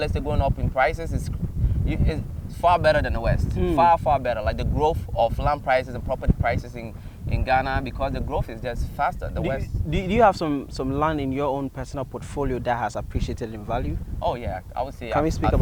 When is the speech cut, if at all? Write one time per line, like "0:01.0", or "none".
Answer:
none

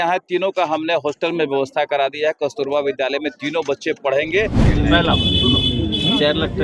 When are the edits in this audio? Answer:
0:04.7

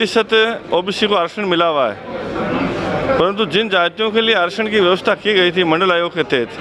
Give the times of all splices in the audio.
none

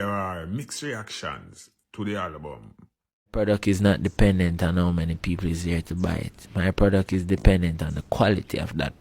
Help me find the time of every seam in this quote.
0:03.3

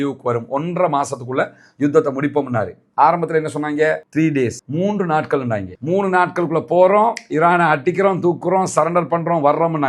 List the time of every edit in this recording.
none

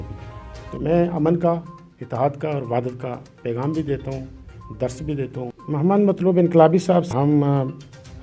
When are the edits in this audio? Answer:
0:05.6
0:07.1

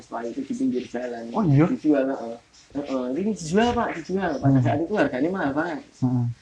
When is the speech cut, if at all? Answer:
0:02.6

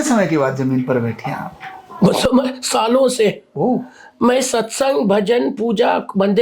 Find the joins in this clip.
none

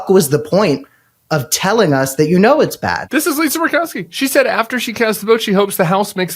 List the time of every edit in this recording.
0:03.0

